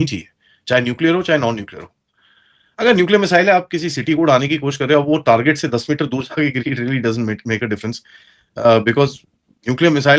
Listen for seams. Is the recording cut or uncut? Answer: uncut